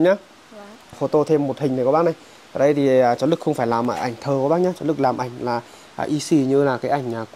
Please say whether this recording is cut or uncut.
cut